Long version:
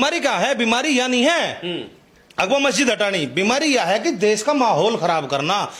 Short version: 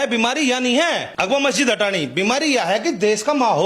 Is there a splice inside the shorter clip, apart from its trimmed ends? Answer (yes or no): yes